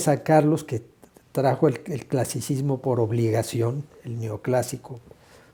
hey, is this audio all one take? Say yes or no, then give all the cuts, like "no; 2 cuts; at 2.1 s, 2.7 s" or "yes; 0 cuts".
yes; 0 cuts